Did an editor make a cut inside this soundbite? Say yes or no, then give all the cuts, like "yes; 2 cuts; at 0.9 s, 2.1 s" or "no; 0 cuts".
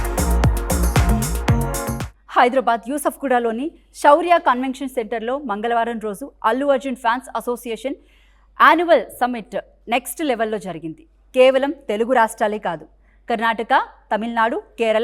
yes; 1 cut; at 1.7 s